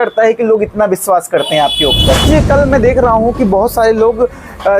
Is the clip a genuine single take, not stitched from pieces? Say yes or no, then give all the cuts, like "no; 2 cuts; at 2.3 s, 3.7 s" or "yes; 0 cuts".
no; 1 cut; at 2.2 s